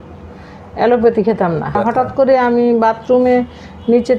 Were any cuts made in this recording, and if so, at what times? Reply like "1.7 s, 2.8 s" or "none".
1.8 s